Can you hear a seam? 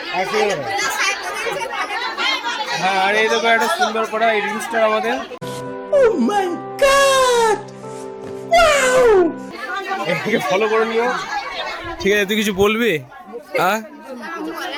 no; 0 cuts

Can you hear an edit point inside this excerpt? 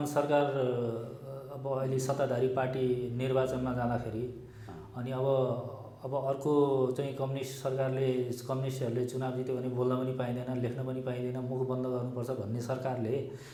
no; 0 cuts

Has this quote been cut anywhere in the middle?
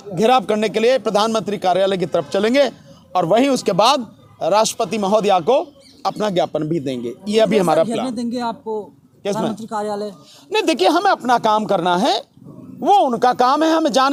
no; 0 cuts

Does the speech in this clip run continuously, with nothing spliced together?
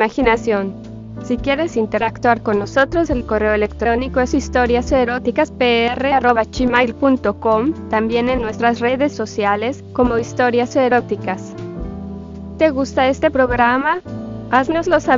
yes; 0 cuts

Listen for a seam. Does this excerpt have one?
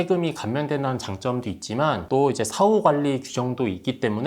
yes; 1 cut; at 2.1 s

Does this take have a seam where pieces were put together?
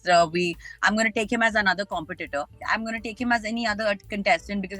no; 0 cuts

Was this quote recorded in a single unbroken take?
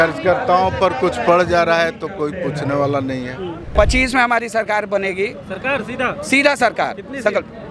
no; 1 cut; at 3.7 s

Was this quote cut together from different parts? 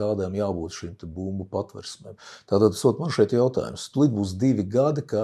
no; 0 cuts

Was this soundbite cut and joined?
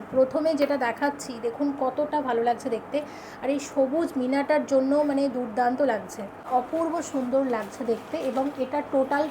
yes; 1 cut; at 6.5 s

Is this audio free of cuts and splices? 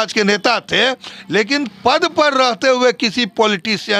yes; 0 cuts

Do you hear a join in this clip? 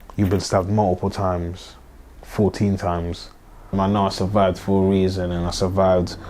yes; 1 cut; at 3.7 s

